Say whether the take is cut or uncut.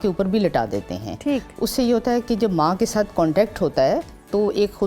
uncut